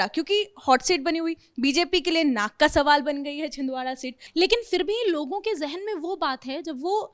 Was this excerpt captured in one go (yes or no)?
no